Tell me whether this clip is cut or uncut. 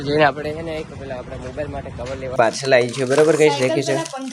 cut